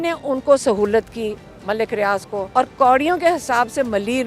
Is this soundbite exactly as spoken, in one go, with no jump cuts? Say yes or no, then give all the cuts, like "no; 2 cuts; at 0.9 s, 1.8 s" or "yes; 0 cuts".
no; 1 cut; at 2.5 s